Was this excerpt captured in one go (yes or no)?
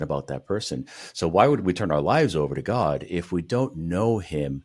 yes